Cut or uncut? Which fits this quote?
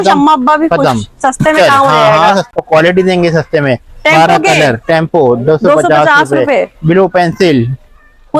cut